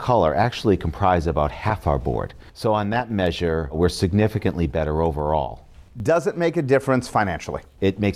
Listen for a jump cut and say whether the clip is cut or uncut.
uncut